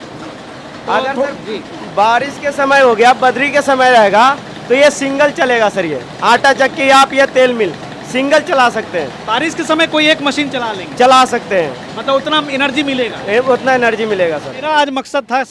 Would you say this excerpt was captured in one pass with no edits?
no; 1 cut; at 14.6 s

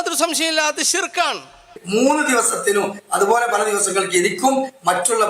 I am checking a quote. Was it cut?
yes; 1 cut; at 1.8 s

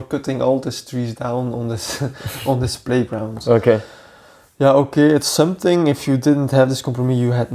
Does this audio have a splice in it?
no; 0 cuts

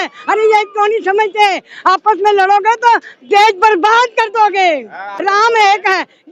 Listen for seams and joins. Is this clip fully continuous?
no; 1 cut; at 5.0 s

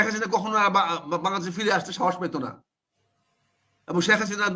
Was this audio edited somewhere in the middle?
no; 0 cuts

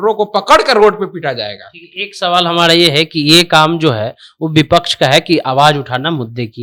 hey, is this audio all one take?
yes; 0 cuts

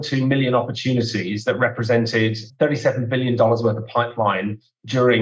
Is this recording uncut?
yes; 0 cuts

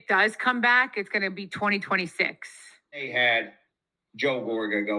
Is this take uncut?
no; 1 cut; at 3.1 s

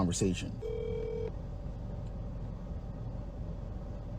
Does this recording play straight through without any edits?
no; 1 cut; at 3.2 s

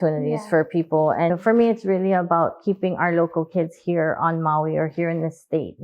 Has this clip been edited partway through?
yes; 1 cut; at 1.3 s

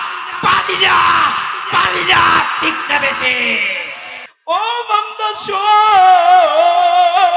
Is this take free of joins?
no; 1 cut; at 4.3 s

